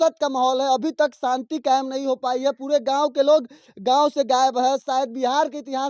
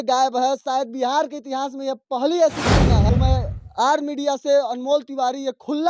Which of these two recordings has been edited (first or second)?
second